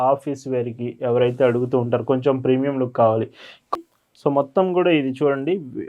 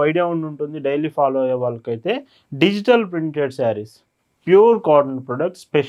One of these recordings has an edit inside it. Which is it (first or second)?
first